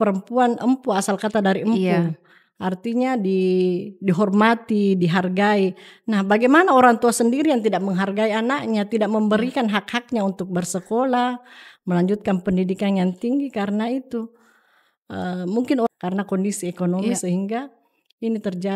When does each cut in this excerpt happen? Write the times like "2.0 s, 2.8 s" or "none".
15.9 s